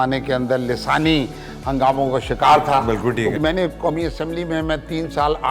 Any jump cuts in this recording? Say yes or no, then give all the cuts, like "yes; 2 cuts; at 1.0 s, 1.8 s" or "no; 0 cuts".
yes; 1 cut; at 3.3 s